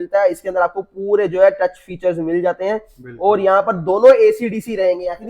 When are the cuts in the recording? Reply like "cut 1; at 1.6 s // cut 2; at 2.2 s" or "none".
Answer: none